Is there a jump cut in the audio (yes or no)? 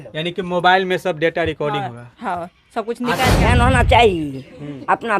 yes